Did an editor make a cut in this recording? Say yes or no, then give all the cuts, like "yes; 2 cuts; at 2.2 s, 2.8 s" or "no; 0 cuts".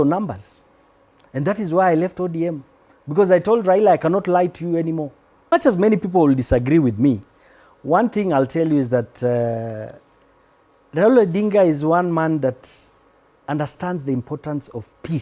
yes; 1 cut; at 5.5 s